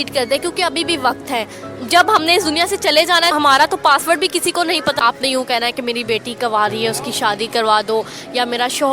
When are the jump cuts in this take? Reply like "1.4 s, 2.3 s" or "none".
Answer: 3.3 s, 4.9 s